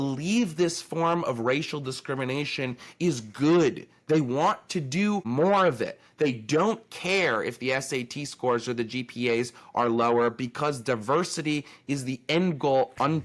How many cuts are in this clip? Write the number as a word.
one